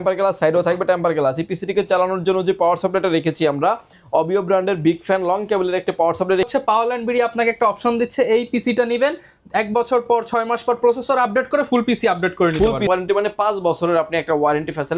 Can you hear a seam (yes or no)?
yes